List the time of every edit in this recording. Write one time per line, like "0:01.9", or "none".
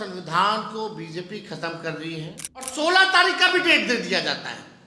0:02.7